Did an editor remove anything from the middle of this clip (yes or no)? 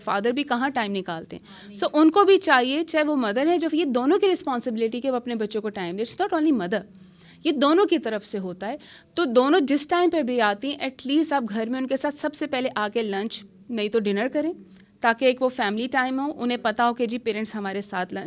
no